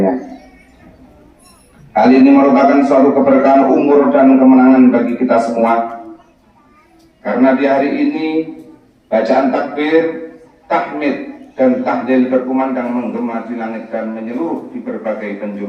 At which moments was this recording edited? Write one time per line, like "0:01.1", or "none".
none